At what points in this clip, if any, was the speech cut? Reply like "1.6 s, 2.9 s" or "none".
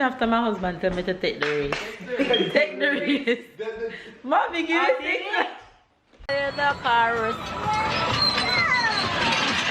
6.2 s